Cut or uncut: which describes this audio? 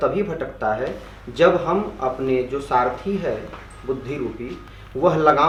uncut